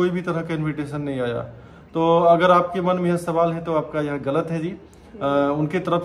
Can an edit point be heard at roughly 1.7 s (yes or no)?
no